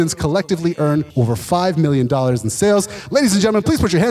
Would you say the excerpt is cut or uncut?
cut